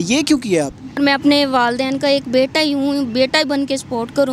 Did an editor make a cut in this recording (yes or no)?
yes